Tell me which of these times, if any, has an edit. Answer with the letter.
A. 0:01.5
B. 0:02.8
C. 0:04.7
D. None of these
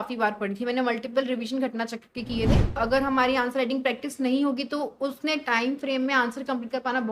B